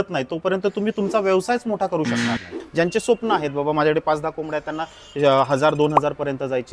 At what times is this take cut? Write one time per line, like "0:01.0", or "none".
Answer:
0:02.5